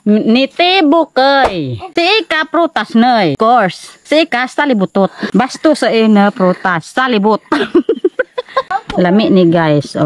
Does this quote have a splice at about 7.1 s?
no; 4 cuts; at 1.4 s, 3.3 s, 5.2 s, 8.7 s

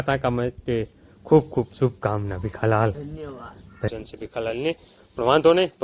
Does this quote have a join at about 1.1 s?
no; 1 cut; at 3.9 s

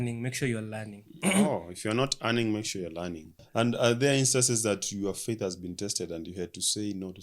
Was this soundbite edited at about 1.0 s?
no; 1 cut; at 3.3 s

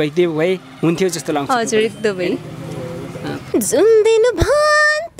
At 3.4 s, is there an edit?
yes; 1 cut; at 3.4 s

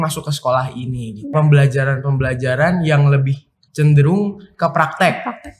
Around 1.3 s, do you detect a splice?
yes; 1 cut; at 1.3 s

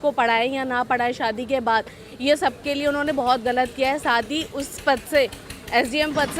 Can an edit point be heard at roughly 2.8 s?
no; 0 cuts

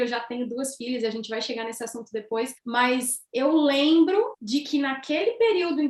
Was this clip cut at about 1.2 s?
no; 2 cuts; at 2.6 s, 4.4 s

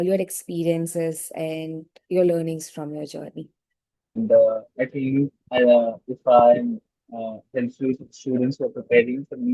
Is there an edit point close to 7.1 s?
no; 1 cut; at 4.1 s

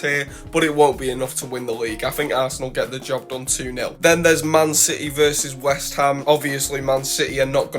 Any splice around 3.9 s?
yes; 2 cuts; at 3.9 s, 6.2 s

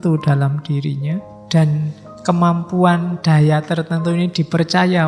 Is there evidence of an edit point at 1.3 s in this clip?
yes; 1 cut; at 1.3 s

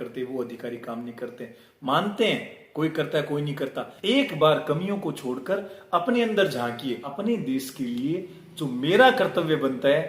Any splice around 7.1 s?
yes; 1 cut; at 7.1 s

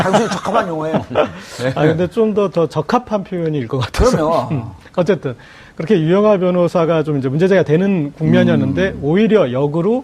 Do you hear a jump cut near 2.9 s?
yes; 1 cut; at 2.9 s

